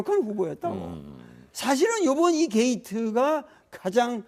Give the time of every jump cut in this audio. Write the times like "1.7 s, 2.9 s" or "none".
0.9 s